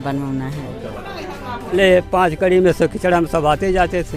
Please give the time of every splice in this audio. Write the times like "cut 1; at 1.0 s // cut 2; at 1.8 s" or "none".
cut 1; at 1.7 s